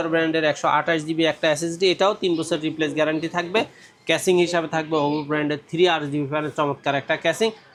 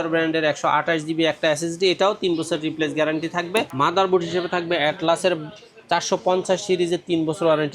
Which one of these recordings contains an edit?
second; 1 cut; at 3.7 s

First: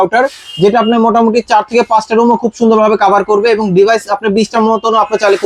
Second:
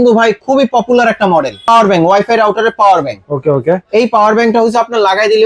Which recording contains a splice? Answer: second; 1 cut; at 1.6 s

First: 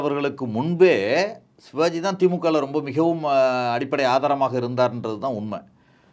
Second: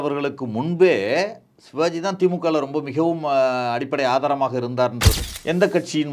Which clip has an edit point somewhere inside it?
second; 1 cut; at 5.1 s

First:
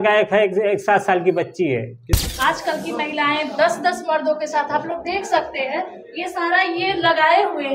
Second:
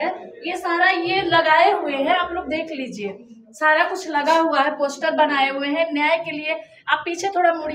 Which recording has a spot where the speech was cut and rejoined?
first; 1 cut; at 2.1 s

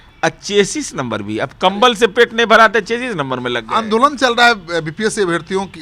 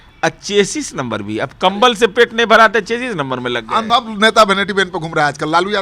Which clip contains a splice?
second; 1 cut; at 3.9 s

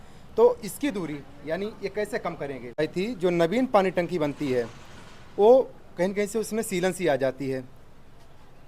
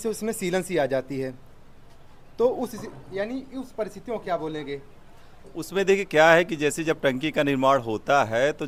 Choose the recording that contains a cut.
first; 1 cut; at 2.7 s

